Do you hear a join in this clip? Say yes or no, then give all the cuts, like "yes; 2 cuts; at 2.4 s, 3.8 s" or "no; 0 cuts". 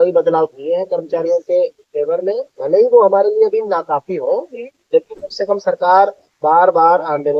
no; 0 cuts